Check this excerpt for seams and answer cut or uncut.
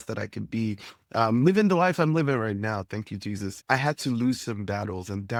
uncut